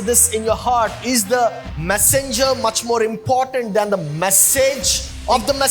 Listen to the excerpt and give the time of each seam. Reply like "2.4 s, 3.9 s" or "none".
none